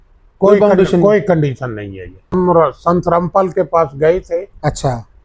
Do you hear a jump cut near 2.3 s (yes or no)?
yes